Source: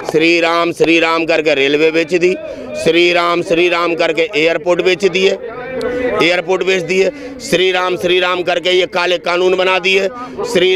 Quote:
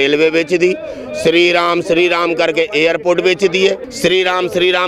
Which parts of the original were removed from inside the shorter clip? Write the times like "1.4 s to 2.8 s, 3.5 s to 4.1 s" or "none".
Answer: 5.5 s to 7.3 s